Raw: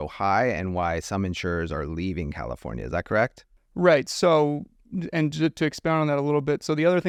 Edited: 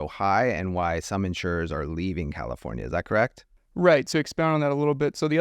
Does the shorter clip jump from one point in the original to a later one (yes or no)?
yes